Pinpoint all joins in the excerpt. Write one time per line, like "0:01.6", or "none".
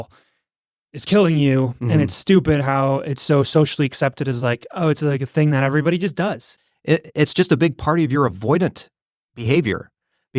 0:06.5